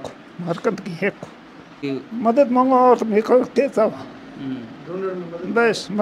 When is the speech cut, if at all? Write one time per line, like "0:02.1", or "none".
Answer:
0:01.8